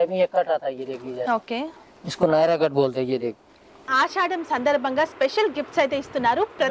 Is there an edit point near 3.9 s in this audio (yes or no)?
yes